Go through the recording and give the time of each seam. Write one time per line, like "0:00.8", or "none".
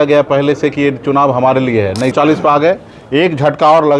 0:02.1